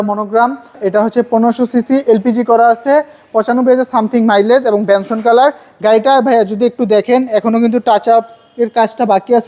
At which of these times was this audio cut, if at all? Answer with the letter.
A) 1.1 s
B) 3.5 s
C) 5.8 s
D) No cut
A